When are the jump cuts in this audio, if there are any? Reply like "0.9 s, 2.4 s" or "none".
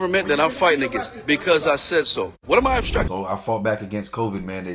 3.1 s